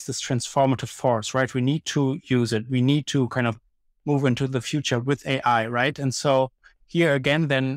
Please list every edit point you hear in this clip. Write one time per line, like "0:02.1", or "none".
none